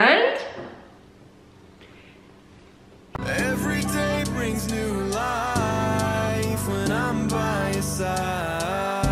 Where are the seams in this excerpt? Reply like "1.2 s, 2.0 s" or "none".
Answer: 3.1 s